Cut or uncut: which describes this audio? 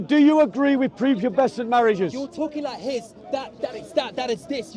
uncut